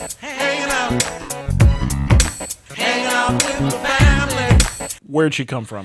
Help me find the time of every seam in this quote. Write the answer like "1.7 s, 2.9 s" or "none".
4.9 s